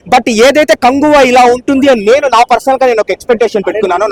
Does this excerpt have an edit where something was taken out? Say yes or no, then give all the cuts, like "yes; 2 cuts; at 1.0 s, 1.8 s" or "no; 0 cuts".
no; 0 cuts